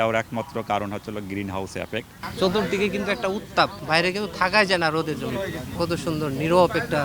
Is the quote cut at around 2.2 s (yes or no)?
yes